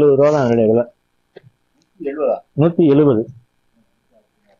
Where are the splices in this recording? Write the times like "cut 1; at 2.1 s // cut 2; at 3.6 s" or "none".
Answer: none